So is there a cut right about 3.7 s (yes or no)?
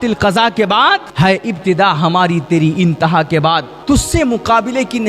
yes